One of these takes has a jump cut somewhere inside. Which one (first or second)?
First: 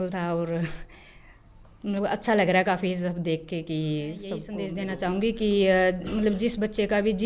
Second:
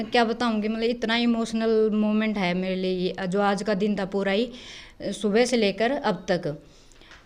first